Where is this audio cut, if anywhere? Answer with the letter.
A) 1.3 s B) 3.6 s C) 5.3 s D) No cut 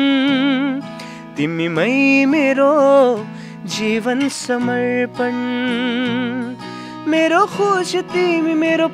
D